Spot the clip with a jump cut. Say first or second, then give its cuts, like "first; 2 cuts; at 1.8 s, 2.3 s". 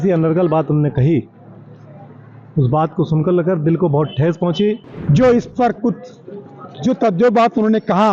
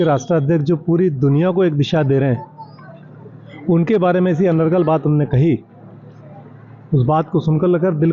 first; 1 cut; at 4.9 s